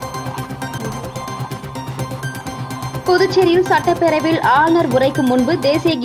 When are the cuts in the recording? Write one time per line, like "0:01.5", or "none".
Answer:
0:01.6